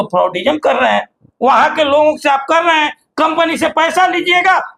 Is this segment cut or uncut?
uncut